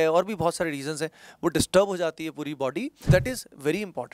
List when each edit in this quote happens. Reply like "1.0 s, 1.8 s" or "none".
3.0 s